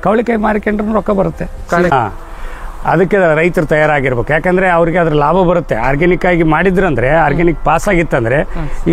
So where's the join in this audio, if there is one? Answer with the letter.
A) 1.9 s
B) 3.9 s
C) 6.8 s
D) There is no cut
A